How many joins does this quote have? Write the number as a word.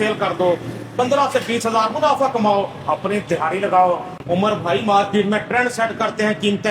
one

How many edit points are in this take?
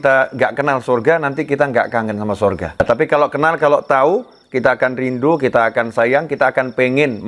one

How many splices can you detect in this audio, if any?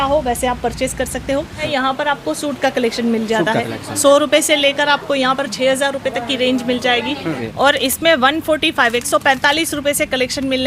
two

